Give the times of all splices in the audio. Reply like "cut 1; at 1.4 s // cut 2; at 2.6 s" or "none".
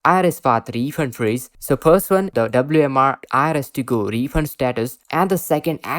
cut 1; at 2.3 s // cut 2; at 5.0 s